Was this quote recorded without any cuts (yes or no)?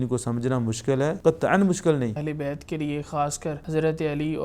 no